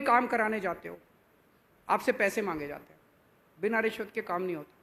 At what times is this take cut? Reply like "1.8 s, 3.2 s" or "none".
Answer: none